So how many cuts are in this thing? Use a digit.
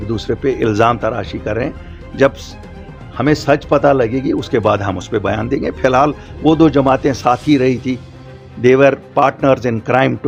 0